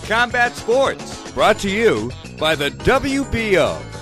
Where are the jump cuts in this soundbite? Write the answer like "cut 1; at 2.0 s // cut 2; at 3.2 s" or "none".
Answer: cut 1; at 1.2 s